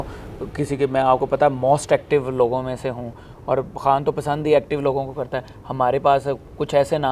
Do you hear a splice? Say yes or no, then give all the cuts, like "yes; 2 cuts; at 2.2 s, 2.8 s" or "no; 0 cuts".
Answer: no; 0 cuts